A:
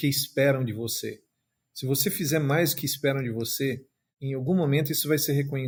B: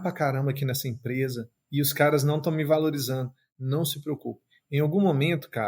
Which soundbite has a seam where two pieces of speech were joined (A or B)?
B